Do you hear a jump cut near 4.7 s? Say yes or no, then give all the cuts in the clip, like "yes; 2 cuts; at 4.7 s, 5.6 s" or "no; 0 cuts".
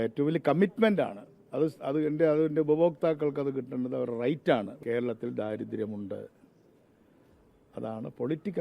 yes; 1 cut; at 4.7 s